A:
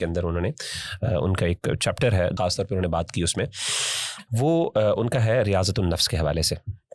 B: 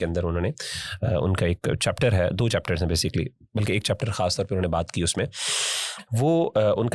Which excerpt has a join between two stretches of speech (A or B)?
A